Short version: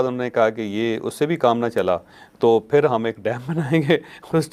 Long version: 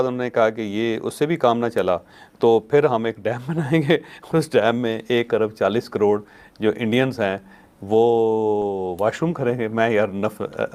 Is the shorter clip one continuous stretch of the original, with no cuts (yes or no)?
yes